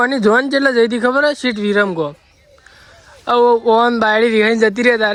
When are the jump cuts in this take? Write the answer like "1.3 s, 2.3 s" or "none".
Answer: none

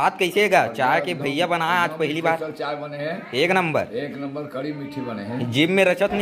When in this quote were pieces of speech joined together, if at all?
none

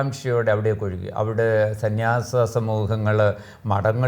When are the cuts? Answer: none

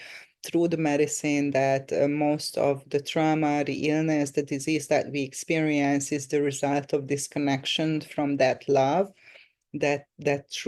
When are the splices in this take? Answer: none

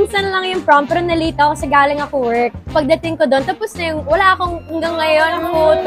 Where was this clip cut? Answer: none

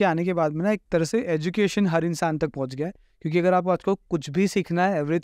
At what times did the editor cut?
none

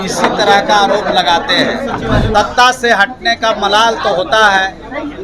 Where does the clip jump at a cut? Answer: 2.3 s

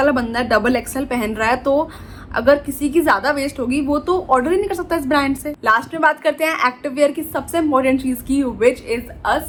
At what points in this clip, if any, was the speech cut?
none

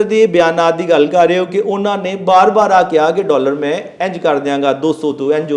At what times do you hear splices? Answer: none

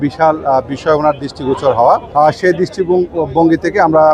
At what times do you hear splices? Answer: 2.1 s

